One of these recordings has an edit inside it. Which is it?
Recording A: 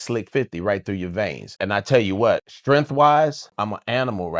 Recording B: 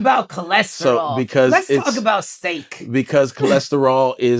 A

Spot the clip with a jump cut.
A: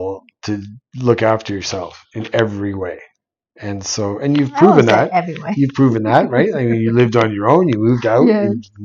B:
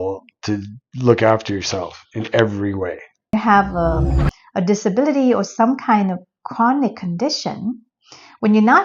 B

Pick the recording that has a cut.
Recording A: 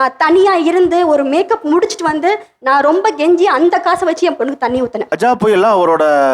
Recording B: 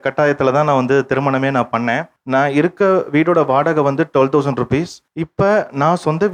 A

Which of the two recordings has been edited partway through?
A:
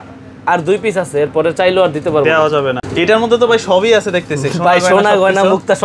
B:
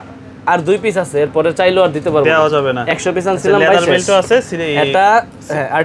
A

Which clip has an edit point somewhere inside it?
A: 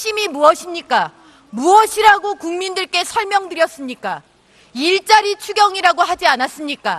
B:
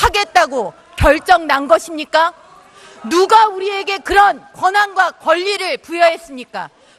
B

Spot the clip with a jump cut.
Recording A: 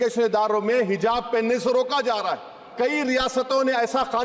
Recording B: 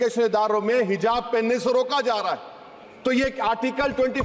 A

